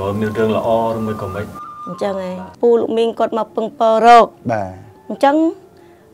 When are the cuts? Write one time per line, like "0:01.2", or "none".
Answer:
0:02.5